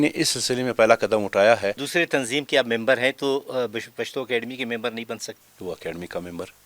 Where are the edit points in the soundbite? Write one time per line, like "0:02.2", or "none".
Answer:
0:01.8
0:05.4